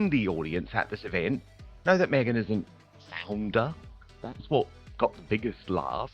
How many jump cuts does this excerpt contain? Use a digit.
1